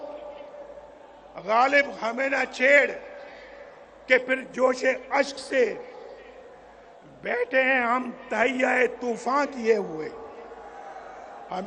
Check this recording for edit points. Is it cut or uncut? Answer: uncut